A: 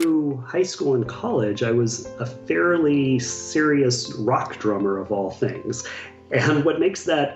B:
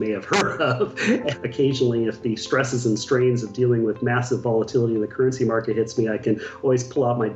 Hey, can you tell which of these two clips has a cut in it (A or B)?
B